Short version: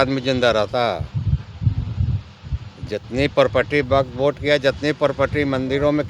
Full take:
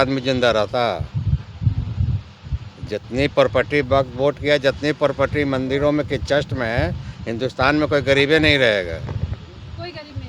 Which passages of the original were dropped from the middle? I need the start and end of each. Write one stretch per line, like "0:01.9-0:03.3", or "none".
none